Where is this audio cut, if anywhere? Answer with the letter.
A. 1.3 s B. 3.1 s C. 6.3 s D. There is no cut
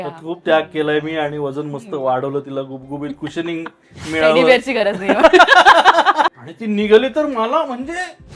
C